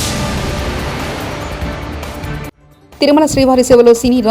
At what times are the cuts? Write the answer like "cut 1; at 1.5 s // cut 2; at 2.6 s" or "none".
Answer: none